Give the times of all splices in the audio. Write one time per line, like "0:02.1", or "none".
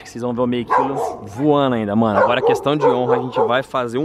none